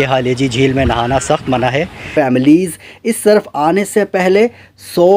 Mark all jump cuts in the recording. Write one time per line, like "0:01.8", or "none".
0:02.0